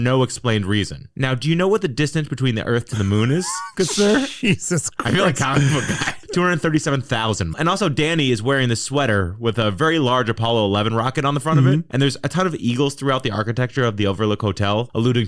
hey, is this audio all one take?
no; 3 cuts; at 6.2 s, 7.5 s, 11.9 s

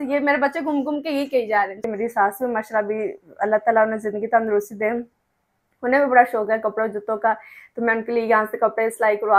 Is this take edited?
yes; 1 cut; at 1.8 s

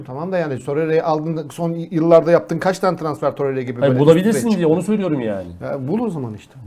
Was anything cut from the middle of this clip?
no; 0 cuts

